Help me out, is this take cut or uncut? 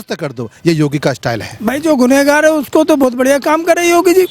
cut